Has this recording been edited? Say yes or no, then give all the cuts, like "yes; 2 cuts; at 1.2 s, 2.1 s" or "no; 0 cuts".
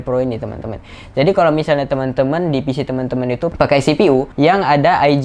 yes; 2 cuts; at 3.5 s, 4.3 s